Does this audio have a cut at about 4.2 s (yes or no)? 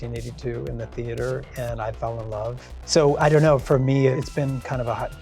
yes